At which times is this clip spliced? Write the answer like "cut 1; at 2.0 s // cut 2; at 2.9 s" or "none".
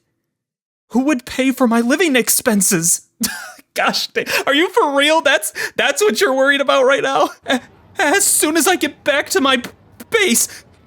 cut 1; at 7.4 s